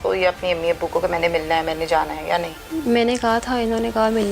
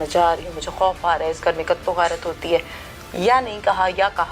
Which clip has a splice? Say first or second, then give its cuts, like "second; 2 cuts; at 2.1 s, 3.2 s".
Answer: first; 1 cut; at 2.6 s